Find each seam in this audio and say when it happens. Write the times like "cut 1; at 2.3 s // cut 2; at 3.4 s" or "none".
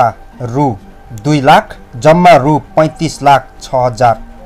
none